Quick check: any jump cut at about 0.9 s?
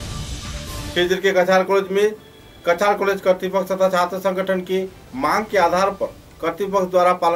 yes; 1 cut; at 0.9 s

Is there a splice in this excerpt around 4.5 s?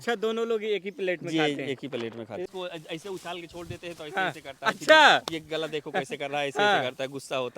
no; 1 cut; at 2.5 s

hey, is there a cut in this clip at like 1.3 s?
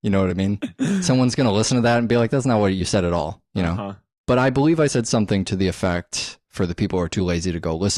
yes; 1 cut; at 1.3 s

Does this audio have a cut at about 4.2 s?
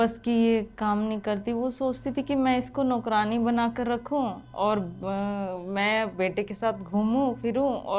no; 0 cuts

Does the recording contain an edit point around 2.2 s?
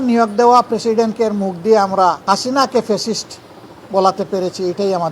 yes; 1 cut; at 2.2 s

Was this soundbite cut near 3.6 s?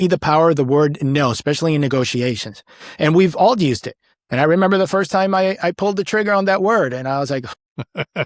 no; 0 cuts

